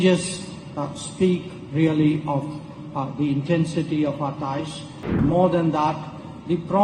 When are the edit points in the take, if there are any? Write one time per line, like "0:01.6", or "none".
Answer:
0:05.2